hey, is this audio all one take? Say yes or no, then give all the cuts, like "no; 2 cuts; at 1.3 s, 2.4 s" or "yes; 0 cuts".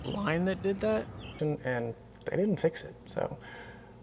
no; 1 cut; at 1.4 s